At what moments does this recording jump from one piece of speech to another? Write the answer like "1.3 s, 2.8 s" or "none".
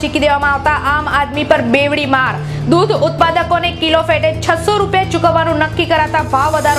none